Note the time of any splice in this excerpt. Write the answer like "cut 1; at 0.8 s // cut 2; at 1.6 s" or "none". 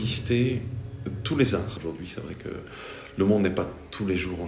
cut 1; at 1.7 s